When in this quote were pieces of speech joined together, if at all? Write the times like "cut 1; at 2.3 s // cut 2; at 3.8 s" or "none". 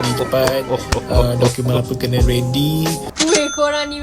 cut 1; at 3.0 s